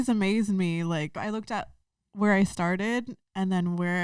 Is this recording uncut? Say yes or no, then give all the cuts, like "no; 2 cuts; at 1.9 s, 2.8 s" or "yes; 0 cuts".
no; 1 cut; at 1.2 s